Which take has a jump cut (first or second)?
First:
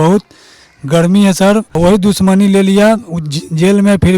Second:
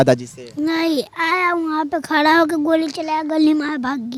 first